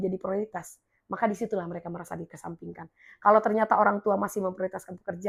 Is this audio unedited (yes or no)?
yes